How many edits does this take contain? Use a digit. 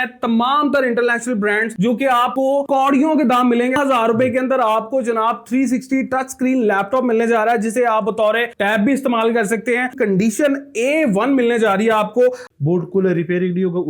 3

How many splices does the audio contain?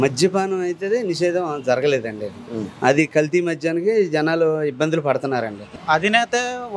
1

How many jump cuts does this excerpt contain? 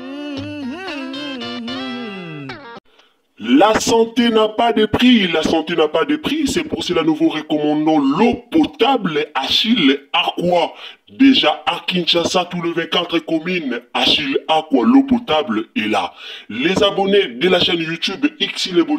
1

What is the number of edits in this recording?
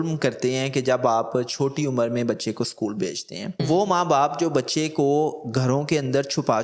1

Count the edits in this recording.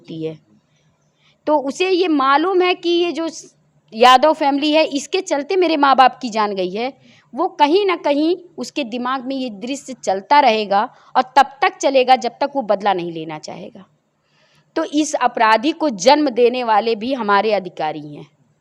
0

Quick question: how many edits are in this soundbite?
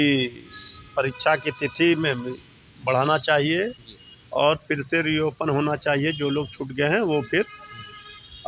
0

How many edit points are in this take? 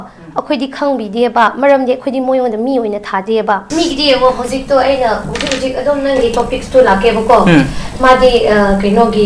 1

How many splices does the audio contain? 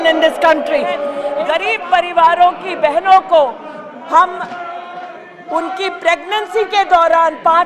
1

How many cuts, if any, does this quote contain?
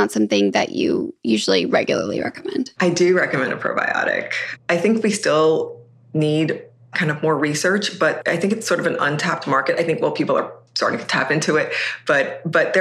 2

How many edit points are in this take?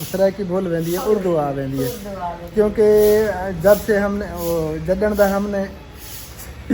0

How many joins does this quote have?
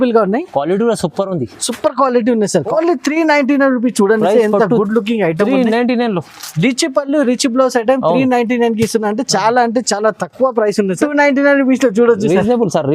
2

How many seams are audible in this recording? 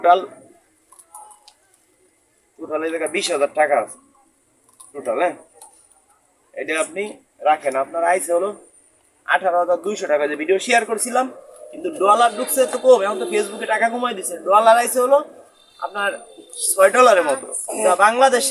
0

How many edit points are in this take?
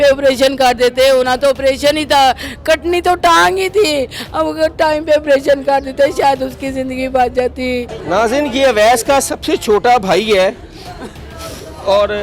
1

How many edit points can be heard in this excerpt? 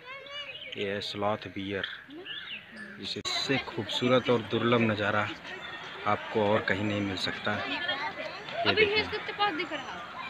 1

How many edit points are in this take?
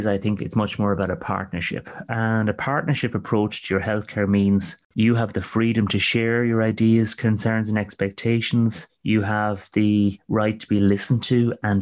3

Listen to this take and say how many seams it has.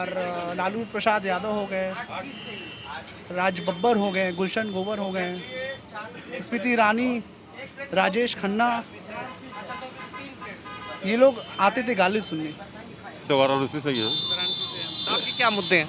1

